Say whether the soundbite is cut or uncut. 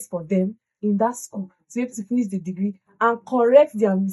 uncut